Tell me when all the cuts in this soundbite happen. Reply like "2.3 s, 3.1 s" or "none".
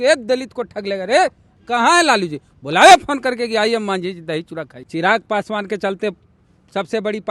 1.5 s, 4.7 s